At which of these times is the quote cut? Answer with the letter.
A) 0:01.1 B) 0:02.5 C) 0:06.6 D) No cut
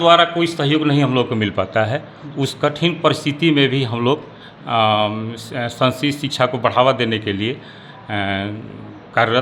D